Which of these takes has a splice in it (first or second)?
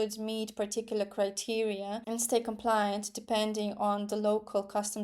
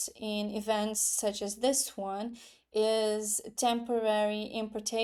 first